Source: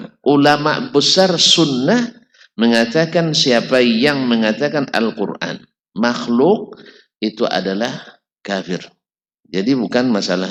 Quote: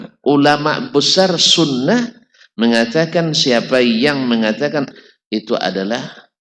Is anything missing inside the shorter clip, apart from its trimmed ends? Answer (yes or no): yes